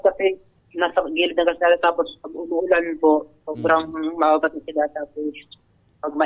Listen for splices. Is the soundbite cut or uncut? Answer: uncut